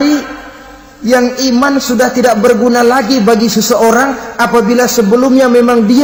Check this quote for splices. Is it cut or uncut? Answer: uncut